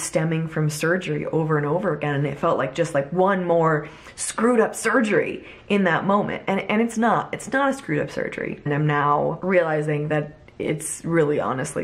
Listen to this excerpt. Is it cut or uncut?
cut